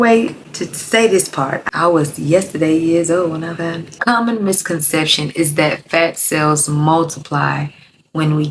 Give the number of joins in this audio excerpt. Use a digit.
2